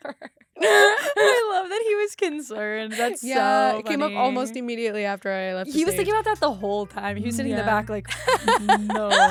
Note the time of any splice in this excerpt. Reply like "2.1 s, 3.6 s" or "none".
none